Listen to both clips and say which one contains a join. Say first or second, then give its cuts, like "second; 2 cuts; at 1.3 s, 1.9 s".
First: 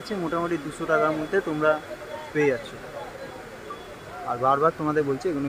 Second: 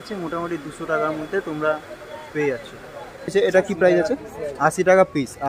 second; 1 cut; at 3.3 s